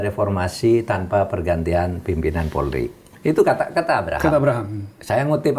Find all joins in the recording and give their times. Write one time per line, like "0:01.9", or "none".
0:03.1